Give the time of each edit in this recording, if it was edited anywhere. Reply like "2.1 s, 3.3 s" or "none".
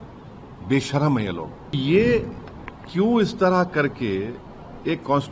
1.8 s